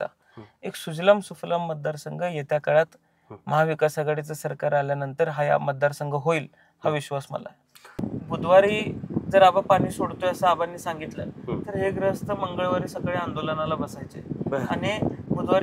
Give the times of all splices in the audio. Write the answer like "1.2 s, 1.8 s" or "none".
8.0 s